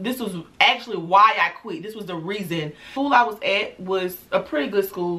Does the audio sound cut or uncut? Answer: cut